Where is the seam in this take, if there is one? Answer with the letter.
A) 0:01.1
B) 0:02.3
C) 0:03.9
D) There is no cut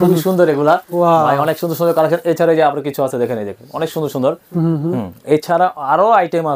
D